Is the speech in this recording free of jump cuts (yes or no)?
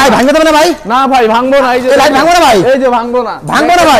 yes